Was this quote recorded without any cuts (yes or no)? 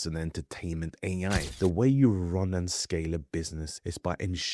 no